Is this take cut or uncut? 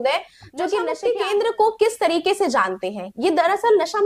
cut